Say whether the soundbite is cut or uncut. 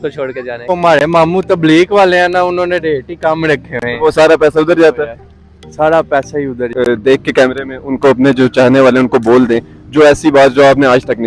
cut